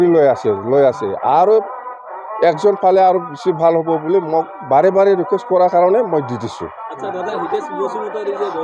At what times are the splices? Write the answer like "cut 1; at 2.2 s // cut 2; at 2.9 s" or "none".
none